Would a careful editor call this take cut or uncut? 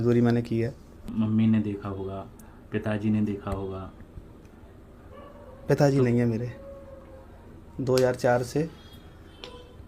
cut